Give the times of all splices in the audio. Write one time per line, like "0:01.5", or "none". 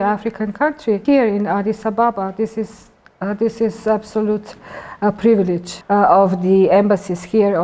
0:01.0
0:05.7